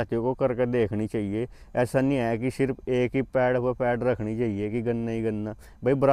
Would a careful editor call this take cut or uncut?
uncut